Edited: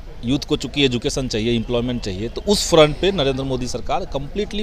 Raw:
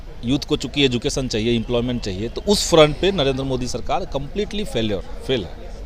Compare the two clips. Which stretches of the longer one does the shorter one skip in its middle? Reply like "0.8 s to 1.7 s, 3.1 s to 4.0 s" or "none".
none